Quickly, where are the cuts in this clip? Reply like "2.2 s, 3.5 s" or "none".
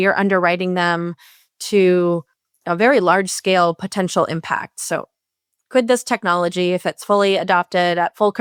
none

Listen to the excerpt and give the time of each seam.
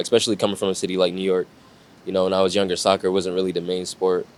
none

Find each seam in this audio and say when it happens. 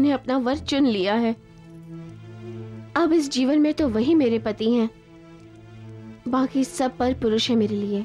none

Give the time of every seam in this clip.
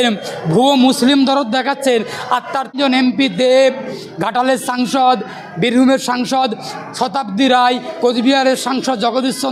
2.8 s

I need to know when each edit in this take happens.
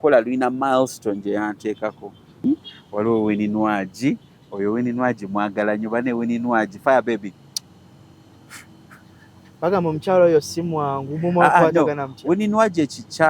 2.4 s

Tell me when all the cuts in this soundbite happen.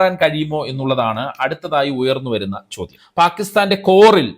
3.0 s

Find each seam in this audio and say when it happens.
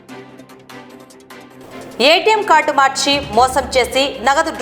1.6 s

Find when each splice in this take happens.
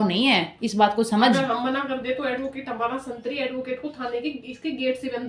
none

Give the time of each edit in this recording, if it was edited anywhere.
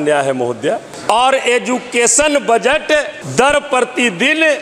0.9 s

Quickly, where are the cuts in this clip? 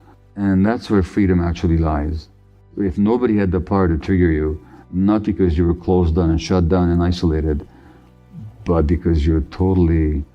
2.7 s

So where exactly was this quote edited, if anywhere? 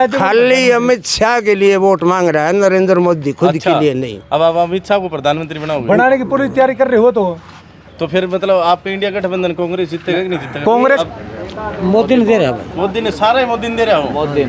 11.0 s

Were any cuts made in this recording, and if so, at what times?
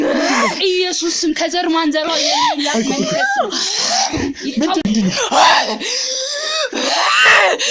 4.8 s

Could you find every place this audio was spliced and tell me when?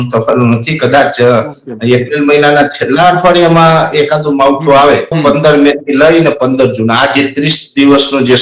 5.2 s

